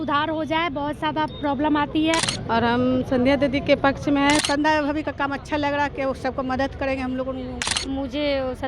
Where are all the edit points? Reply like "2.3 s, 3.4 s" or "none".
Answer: 2.3 s, 4.4 s, 7.7 s